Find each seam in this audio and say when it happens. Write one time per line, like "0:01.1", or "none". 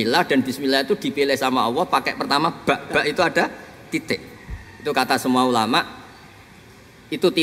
none